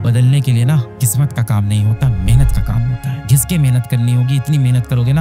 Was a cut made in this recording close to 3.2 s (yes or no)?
yes